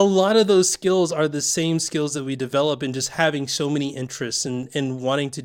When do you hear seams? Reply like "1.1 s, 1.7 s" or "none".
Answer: none